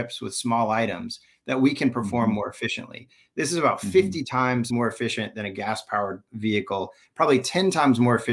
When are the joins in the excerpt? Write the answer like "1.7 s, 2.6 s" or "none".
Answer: 4.7 s, 6.3 s